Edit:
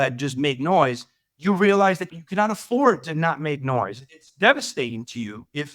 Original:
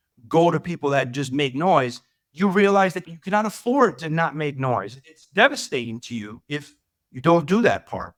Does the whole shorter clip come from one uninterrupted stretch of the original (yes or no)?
yes